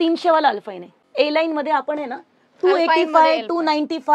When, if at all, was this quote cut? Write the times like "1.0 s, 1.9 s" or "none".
1.0 s